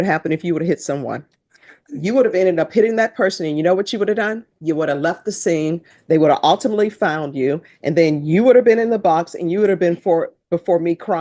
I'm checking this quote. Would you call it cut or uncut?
uncut